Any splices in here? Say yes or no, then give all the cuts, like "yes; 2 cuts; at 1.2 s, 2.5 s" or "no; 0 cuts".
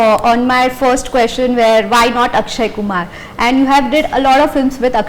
no; 0 cuts